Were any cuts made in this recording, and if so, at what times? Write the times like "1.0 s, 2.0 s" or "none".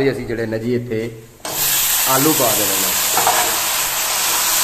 none

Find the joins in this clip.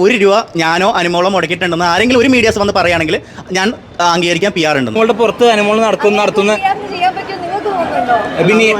5.0 s

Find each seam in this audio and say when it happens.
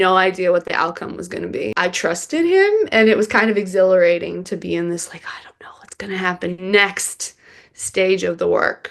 1.7 s

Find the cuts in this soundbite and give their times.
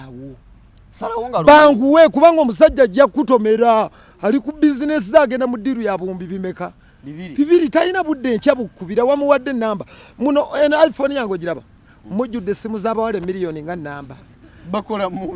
none

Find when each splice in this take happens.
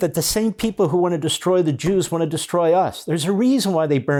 none

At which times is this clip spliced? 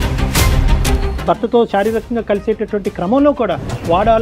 1.1 s

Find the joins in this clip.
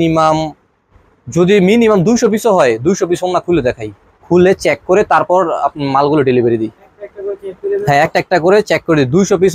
none

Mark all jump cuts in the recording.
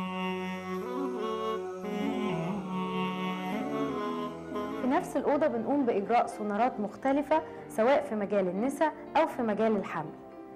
2.6 s

